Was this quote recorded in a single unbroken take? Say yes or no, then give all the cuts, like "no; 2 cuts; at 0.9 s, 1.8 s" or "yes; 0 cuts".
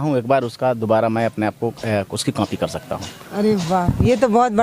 yes; 0 cuts